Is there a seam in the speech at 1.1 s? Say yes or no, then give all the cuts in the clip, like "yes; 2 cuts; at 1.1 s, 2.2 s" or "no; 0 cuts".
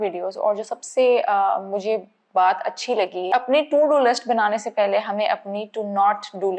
no; 1 cut; at 3.3 s